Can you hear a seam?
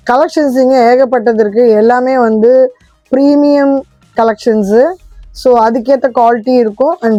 no; 0 cuts

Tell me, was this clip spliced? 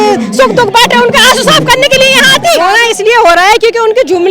yes; 1 cut; at 2.6 s

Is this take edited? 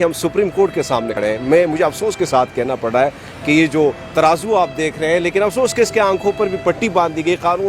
yes; 1 cut; at 1.1 s

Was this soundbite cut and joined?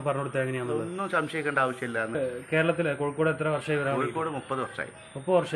yes; 1 cut; at 2.2 s

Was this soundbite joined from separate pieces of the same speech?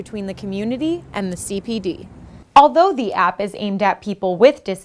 yes; 1 cut; at 2.3 s

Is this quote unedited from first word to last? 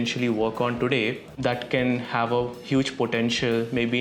no; 1 cut; at 1.3 s

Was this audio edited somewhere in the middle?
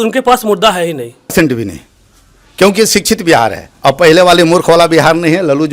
yes; 1 cut; at 1.3 s

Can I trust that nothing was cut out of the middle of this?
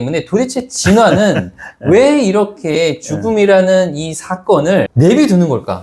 no; 1 cut; at 4.9 s

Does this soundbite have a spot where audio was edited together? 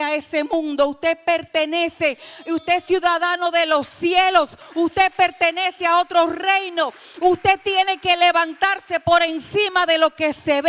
no; 0 cuts

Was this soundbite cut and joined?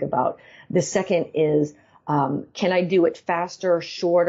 no; 0 cuts

